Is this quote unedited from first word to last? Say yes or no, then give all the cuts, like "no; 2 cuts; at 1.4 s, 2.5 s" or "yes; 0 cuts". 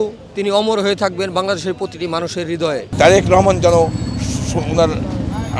no; 1 cut; at 2.9 s